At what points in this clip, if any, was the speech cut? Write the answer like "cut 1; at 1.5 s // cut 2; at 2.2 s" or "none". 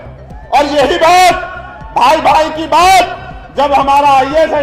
none